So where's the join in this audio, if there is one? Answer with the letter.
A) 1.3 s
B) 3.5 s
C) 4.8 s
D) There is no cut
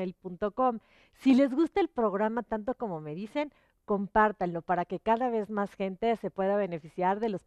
C